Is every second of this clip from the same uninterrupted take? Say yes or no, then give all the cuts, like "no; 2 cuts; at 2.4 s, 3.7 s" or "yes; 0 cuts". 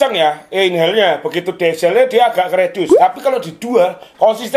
yes; 0 cuts